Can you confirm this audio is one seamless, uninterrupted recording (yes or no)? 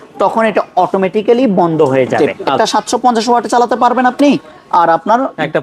no